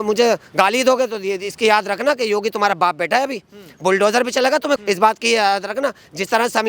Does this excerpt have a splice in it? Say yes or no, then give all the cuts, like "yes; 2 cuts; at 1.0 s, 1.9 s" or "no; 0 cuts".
no; 0 cuts